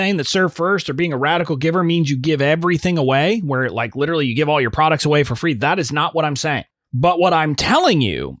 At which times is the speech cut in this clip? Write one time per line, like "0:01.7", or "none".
0:06.8